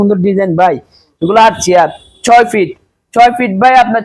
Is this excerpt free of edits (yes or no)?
yes